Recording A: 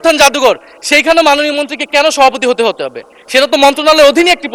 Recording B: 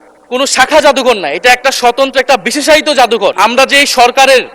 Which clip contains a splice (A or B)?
B